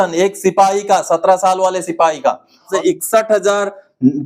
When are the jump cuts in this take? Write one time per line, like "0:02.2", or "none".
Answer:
0:02.7